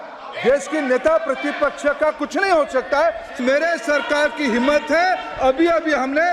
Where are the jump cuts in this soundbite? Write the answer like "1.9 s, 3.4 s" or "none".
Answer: 3.4 s